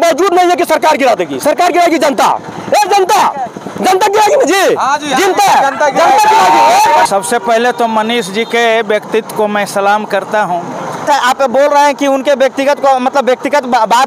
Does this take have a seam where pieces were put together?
yes; 2 cuts; at 7.0 s, 11.1 s

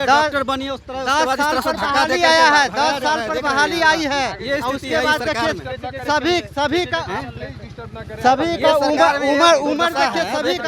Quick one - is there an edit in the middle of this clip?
no; 0 cuts

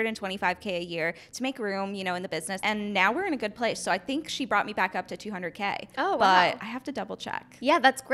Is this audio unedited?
no; 1 cut; at 2.5 s

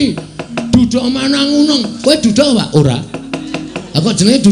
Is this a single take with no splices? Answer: no; 1 cut; at 1.9 s

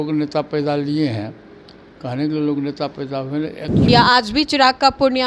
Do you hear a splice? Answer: yes; 1 cut; at 3.8 s

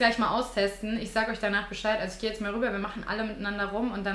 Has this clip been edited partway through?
no; 0 cuts

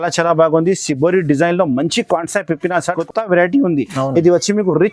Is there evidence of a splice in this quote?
yes; 1 cut; at 3.0 s

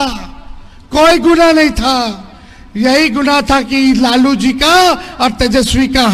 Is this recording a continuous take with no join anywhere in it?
yes; 0 cuts

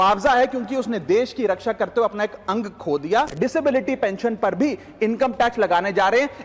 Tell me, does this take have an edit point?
yes; 1 cut; at 3.3 s

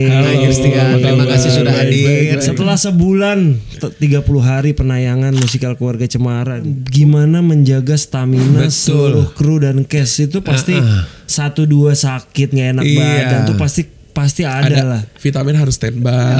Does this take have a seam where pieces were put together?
yes; 3 cuts; at 2.5 s, 6.8 s, 15.1 s

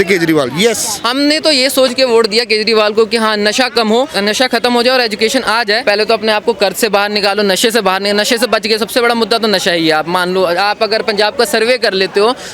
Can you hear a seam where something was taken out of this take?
yes; 3 cuts; at 0.9 s, 4.1 s, 5.8 s

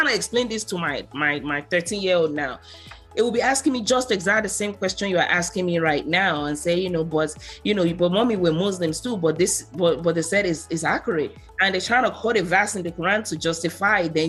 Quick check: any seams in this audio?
no; 0 cuts

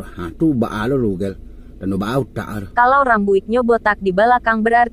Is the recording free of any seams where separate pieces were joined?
no; 1 cut; at 2.7 s

